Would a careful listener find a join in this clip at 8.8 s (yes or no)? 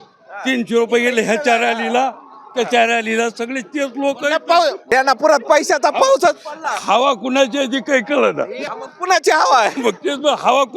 yes